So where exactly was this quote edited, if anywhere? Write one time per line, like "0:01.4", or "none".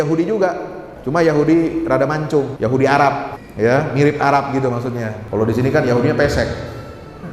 0:00.9
0:02.5
0:03.4
0:05.2